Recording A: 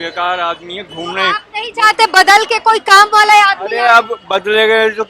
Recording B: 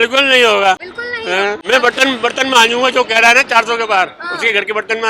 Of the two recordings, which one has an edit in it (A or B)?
B